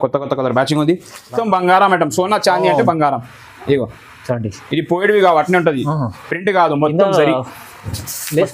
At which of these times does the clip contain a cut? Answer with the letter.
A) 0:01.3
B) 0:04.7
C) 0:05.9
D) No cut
A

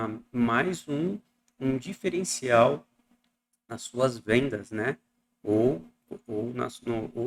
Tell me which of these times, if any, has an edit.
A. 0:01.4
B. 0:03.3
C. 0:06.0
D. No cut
D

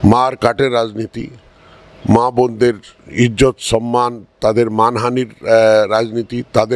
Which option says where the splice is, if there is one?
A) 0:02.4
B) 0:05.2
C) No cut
C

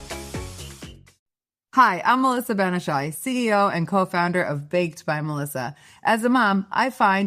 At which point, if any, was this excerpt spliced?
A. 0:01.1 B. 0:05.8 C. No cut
A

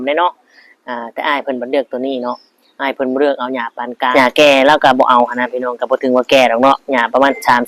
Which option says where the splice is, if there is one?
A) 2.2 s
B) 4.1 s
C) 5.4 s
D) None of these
B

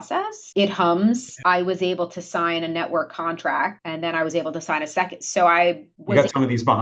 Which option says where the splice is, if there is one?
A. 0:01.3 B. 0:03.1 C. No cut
A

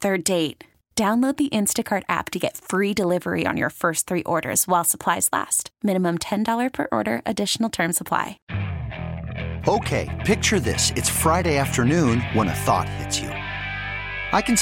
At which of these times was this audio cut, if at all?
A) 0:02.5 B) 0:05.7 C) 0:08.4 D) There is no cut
C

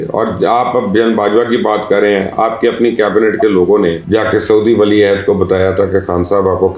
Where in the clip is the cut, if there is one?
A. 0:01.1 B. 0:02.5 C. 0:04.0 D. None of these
C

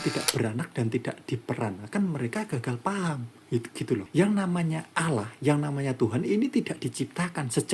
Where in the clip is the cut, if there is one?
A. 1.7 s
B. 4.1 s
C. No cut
B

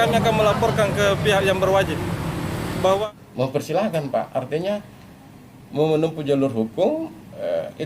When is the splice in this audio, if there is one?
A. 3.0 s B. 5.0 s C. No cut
A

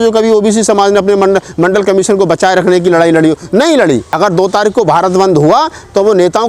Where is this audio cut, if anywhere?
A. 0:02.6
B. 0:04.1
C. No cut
B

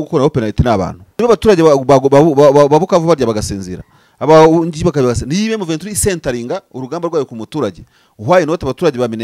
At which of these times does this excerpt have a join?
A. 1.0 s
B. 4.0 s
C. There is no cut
A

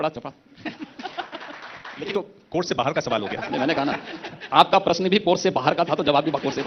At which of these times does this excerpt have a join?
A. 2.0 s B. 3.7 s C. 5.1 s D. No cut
A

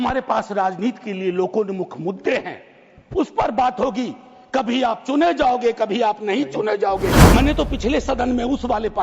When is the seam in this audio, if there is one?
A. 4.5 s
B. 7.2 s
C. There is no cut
B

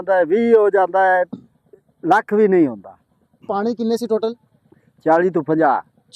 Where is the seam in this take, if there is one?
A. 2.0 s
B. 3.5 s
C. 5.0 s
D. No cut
B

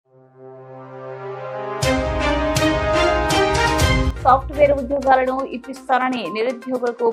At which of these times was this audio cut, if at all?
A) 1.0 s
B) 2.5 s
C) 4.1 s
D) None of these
C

